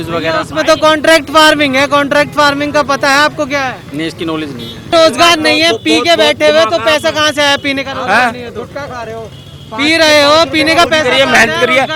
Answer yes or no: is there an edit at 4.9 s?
yes